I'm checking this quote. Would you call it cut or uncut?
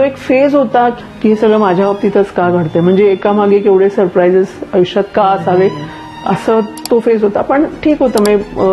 cut